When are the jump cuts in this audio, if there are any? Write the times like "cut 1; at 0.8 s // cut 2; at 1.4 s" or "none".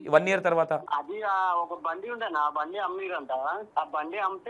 cut 1; at 0.8 s // cut 2; at 3.6 s